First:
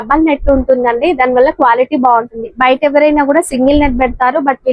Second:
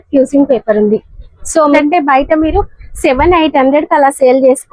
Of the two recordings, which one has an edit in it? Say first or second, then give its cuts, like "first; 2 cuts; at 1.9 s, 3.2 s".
second; 1 cut; at 1.8 s